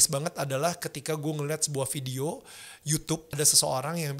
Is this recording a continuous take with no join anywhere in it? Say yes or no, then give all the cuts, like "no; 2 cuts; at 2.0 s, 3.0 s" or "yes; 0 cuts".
no; 1 cut; at 3.3 s